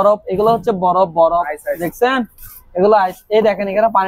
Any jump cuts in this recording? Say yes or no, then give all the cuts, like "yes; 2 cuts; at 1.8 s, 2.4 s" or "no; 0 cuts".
no; 0 cuts